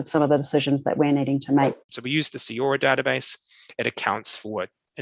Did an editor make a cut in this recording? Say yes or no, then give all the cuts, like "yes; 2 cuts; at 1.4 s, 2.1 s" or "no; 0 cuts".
yes; 1 cut; at 1.8 s